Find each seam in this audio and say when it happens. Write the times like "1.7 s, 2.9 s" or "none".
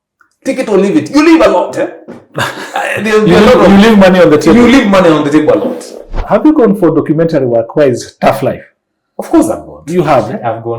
6.2 s